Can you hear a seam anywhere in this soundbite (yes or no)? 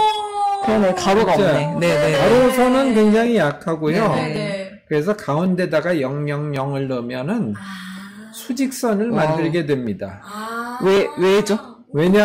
no